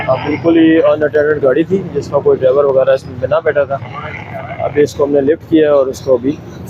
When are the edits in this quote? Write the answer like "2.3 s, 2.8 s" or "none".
none